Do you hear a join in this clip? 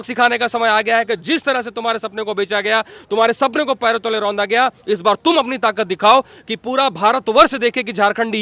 no; 0 cuts

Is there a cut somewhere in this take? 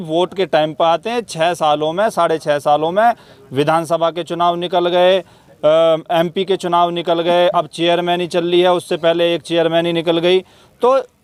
no; 0 cuts

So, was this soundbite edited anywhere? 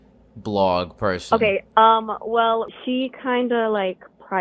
yes; 1 cut; at 2.7 s

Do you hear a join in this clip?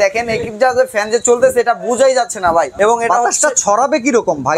yes; 1 cut; at 2.7 s

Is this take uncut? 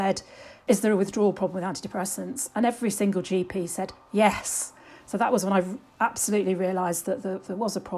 yes; 0 cuts

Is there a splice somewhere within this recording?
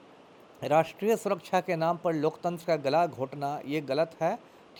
no; 0 cuts

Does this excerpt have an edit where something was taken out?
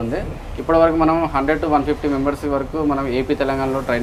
no; 0 cuts

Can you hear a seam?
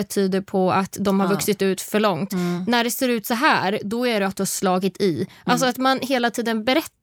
no; 0 cuts

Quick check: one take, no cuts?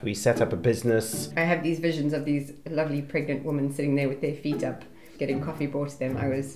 no; 2 cuts; at 1.2 s, 5.1 s

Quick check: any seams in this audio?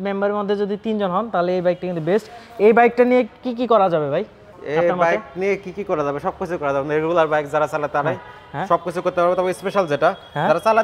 no; 0 cuts

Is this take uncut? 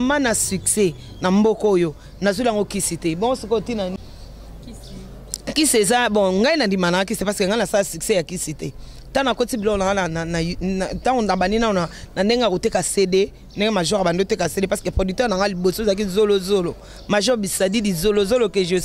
yes; 0 cuts

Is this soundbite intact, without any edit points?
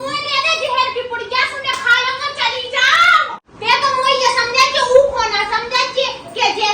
no; 1 cut; at 3.4 s

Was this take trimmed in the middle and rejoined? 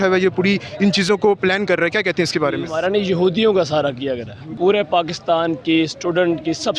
yes; 2 cuts; at 2.7 s, 4.5 s

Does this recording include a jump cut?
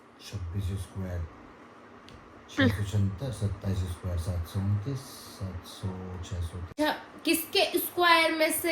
yes; 1 cut; at 6.7 s

